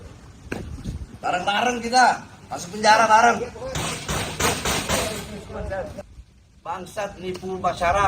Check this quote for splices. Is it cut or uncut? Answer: cut